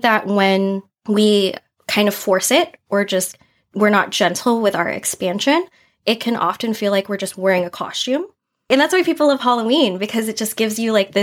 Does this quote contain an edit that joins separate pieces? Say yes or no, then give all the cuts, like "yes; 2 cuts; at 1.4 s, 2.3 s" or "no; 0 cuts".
yes; 2 cuts; at 0.9 s, 8.7 s